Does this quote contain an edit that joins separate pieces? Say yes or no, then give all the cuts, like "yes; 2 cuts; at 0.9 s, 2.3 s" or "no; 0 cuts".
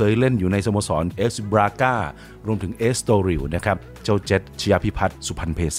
yes; 2 cuts; at 1.1 s, 3.9 s